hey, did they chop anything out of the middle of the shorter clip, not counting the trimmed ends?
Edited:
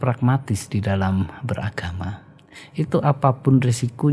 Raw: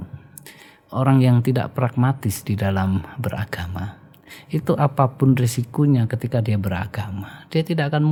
no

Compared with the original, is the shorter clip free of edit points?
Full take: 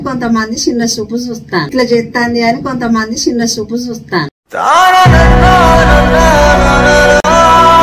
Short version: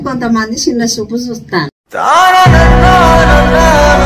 no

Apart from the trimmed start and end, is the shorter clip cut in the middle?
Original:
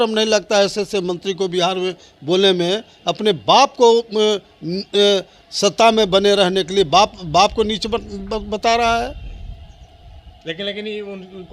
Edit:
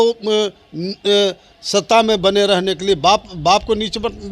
no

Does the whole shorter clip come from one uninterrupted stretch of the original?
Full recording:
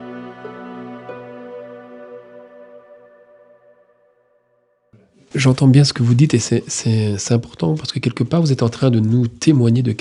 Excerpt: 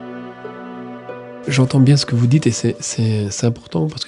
no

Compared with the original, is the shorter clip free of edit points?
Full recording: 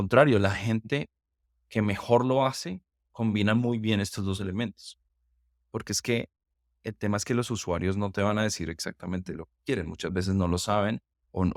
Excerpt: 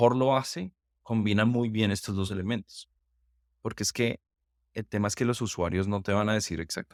yes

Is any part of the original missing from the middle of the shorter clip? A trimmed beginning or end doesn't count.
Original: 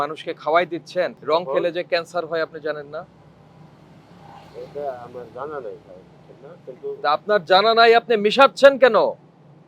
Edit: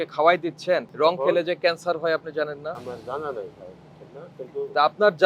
yes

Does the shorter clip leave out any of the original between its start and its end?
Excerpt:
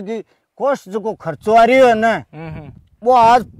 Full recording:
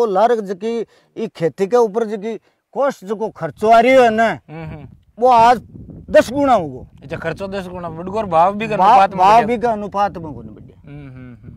no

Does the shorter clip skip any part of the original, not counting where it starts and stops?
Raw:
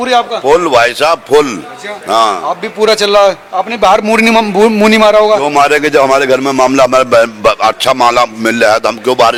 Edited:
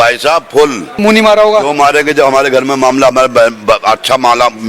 yes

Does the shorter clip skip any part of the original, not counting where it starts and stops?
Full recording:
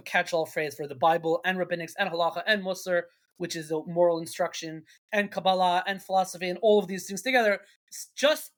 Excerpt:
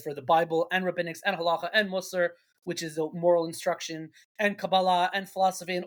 no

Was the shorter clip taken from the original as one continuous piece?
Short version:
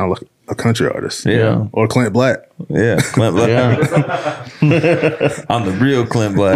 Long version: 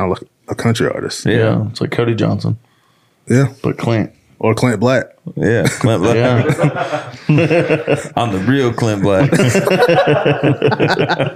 no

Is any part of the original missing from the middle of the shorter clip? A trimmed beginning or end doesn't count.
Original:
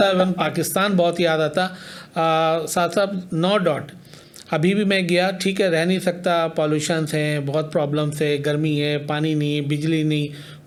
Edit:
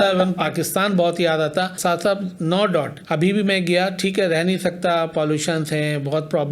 yes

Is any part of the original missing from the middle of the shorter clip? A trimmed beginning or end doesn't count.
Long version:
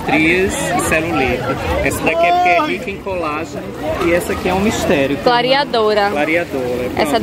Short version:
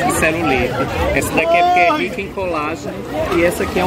no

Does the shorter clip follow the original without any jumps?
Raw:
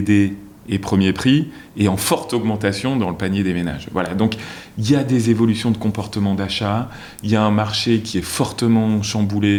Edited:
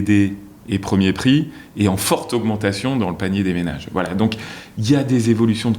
yes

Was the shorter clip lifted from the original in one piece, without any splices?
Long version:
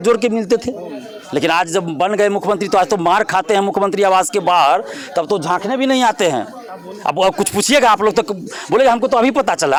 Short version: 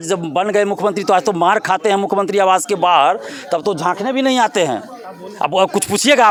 yes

